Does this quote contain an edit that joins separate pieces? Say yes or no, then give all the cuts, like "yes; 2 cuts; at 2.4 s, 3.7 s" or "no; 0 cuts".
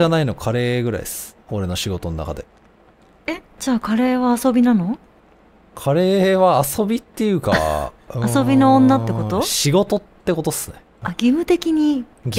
no; 0 cuts